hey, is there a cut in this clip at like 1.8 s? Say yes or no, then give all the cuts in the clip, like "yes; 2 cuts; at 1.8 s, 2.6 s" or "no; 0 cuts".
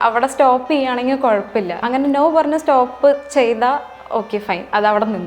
yes; 1 cut; at 1.8 s